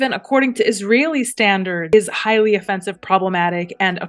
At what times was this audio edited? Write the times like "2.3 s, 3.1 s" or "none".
1.9 s